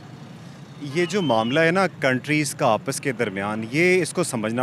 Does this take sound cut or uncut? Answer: uncut